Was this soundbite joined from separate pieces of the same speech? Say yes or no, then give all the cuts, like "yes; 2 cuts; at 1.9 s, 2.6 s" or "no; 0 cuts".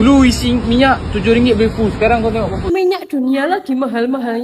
yes; 1 cut; at 2.6 s